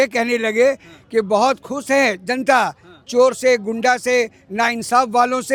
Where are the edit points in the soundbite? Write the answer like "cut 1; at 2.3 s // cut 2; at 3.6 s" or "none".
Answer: none

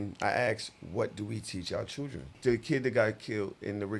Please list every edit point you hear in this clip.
cut 1; at 2.3 s

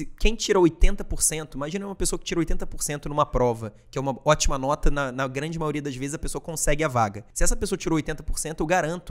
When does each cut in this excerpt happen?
cut 1; at 7.3 s

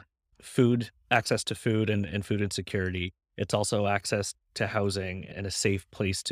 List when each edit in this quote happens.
cut 1; at 5.3 s

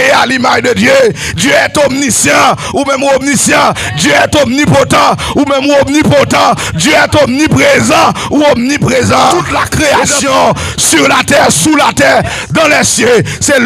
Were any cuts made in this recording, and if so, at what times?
cut 1; at 9.3 s

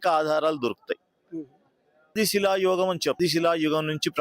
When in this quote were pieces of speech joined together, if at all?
cut 1; at 2.1 s // cut 2; at 3.2 s

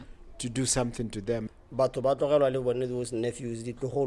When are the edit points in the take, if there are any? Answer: cut 1; at 1.5 s

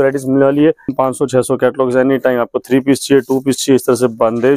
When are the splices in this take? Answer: cut 1; at 0.9 s

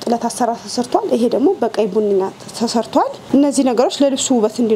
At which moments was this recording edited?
cut 1; at 3.2 s

